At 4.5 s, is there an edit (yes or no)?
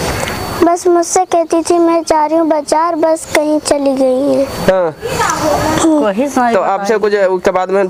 no